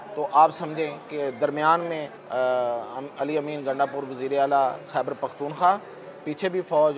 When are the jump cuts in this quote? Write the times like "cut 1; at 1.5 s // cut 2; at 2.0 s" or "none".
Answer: cut 1; at 2.2 s